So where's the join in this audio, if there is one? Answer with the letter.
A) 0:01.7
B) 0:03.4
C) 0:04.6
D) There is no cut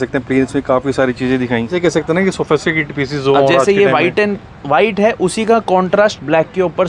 A